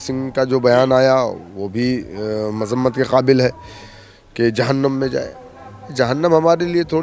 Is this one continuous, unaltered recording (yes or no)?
yes